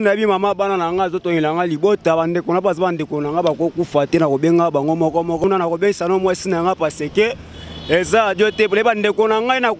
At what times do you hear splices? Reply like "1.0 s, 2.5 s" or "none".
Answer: 5.4 s